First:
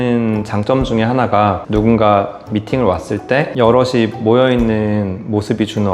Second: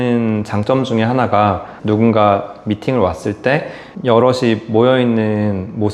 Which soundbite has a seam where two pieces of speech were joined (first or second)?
first